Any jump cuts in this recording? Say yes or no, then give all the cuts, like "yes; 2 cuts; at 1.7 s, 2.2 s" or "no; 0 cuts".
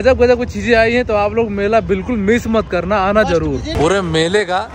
yes; 1 cut; at 3.7 s